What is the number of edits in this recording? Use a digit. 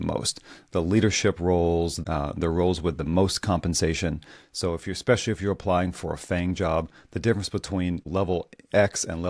2